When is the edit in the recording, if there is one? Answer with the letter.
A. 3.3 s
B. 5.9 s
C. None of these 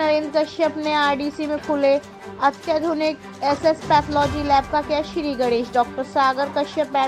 C